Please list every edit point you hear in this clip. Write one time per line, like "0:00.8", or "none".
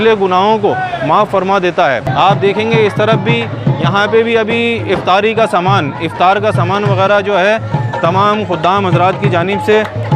0:02.1

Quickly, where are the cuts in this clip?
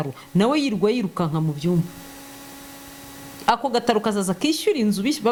none

